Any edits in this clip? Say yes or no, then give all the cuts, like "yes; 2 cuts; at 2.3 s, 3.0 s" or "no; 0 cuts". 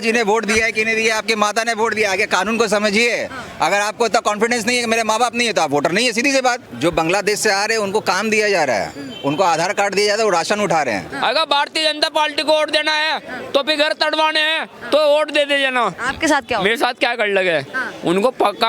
yes; 3 cuts; at 6.6 s, 11.1 s, 16.0 s